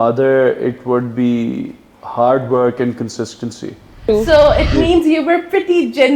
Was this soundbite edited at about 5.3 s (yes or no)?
no